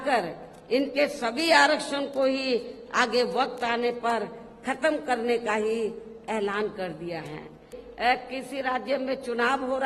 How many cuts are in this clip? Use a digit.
1